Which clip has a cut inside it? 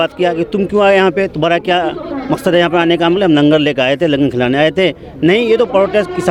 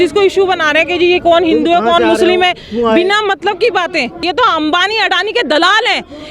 second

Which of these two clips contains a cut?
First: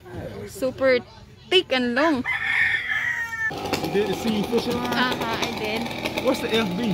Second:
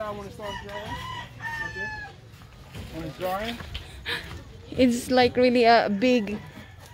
first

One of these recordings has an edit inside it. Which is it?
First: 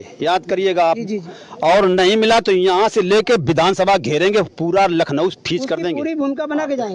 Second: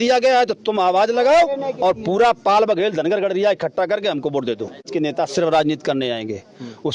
second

